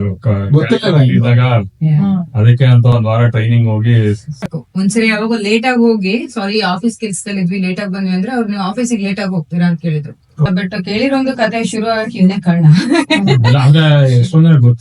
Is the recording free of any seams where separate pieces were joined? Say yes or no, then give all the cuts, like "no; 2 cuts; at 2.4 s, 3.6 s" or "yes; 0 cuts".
no; 2 cuts; at 4.6 s, 10.5 s